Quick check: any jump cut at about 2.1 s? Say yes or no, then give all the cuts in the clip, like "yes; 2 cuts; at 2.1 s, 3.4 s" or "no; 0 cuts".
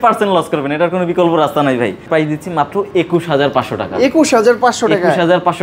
yes; 1 cut; at 2.1 s